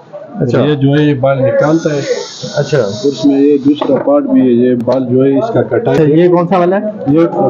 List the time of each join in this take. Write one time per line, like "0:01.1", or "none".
0:06.0